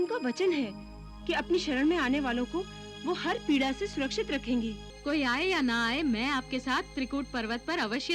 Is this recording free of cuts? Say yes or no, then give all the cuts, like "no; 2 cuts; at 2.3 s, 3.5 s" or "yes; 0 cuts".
no; 1 cut; at 4.9 s